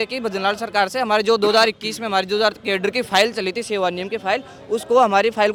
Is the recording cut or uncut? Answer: uncut